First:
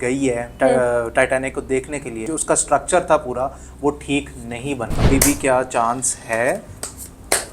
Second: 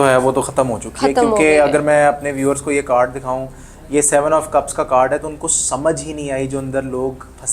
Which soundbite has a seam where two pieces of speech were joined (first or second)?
first